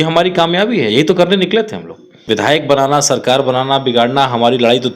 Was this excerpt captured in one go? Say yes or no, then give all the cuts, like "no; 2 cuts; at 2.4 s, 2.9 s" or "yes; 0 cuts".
no; 1 cut; at 2.2 s